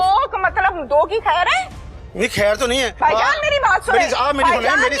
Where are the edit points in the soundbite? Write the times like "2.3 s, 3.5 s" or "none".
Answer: 2.9 s